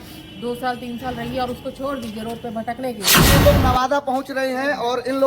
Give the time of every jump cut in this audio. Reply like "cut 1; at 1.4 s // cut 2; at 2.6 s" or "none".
cut 1; at 3.2 s